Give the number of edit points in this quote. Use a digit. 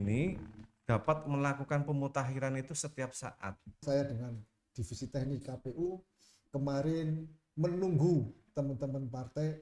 1